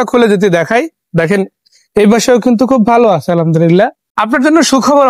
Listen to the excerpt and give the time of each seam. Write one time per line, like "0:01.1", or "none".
0:04.0